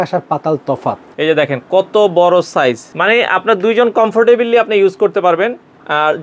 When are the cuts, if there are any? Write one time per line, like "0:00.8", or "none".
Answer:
0:01.0
0:02.9